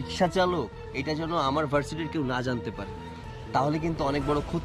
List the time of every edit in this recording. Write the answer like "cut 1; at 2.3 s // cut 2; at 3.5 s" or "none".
none